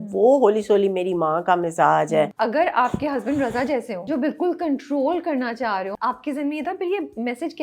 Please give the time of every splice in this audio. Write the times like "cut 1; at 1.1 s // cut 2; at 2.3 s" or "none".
cut 1; at 2.3 s // cut 2; at 4.0 s // cut 3; at 5.9 s